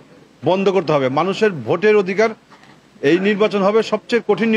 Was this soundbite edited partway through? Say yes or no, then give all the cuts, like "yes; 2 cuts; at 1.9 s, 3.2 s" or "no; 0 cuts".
no; 0 cuts